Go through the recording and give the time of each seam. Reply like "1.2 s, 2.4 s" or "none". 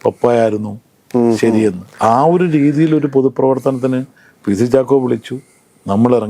1.9 s

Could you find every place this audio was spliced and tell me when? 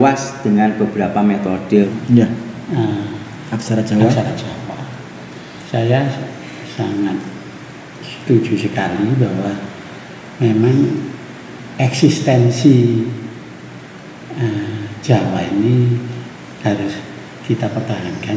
1.9 s

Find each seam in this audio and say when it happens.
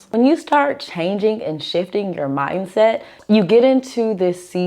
3.1 s

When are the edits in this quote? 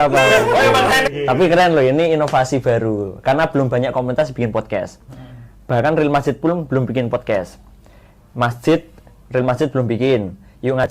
1.1 s

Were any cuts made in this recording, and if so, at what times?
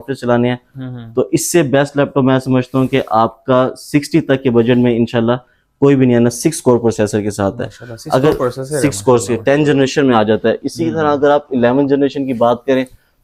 none

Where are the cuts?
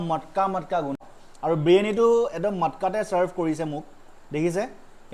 1.0 s

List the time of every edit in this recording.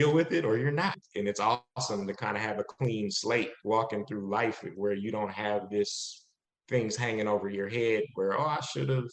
1.0 s

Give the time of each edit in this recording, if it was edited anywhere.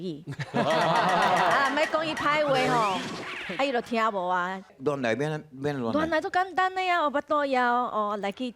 4.8 s

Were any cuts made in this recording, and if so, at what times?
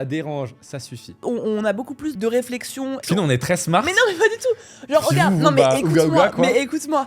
1.1 s, 2.2 s, 3.0 s

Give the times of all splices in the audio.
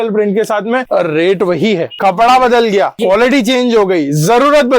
0.8 s, 1.9 s, 2.9 s

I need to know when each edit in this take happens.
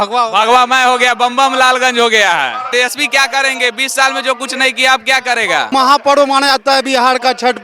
2.7 s, 5.7 s

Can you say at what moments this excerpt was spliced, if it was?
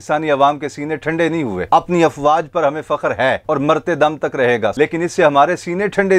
1.6 s, 4.7 s

